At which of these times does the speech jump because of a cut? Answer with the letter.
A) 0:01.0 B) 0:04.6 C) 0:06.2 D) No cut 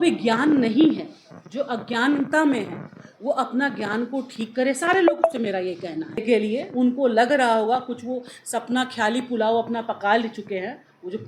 C